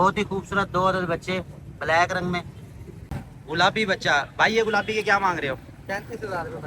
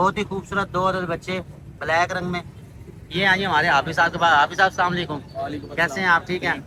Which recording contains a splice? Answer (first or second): first